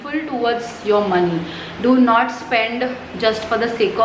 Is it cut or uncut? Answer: uncut